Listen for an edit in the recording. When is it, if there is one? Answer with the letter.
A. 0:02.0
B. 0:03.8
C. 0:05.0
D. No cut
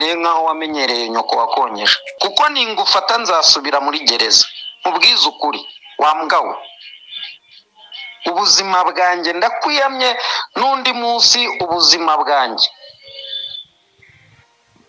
A